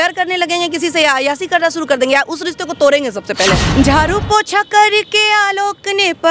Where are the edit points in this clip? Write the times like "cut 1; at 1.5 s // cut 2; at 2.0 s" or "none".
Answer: cut 1; at 3.6 s